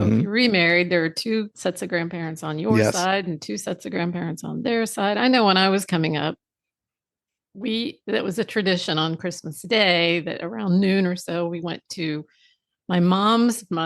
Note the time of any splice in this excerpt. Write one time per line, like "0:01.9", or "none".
0:01.5